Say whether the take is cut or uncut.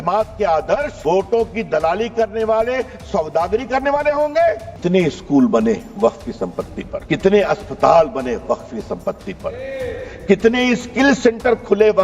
cut